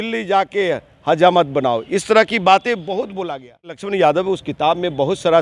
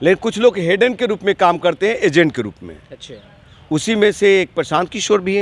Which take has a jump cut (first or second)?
first